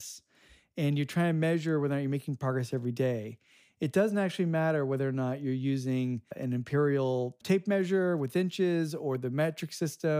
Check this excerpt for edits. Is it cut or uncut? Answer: uncut